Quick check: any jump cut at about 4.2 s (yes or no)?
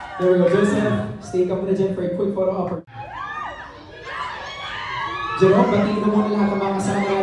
no